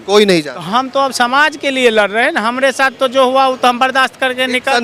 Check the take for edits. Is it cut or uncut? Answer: uncut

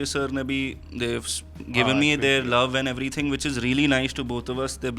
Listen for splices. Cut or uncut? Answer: uncut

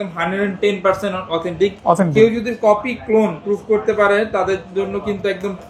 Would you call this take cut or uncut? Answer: uncut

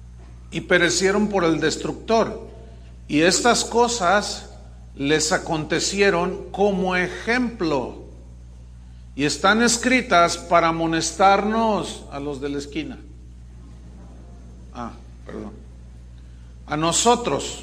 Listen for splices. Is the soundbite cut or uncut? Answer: uncut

